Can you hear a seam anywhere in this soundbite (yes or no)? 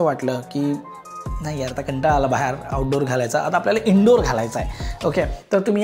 no